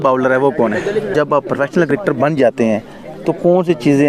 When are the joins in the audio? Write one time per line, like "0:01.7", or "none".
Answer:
0:01.1